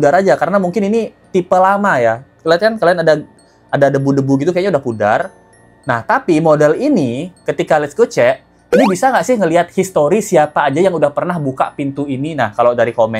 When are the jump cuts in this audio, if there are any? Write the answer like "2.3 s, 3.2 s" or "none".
none